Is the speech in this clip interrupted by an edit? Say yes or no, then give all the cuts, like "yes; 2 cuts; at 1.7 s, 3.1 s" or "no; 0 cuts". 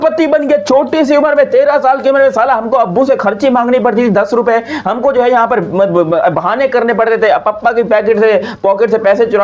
no; 0 cuts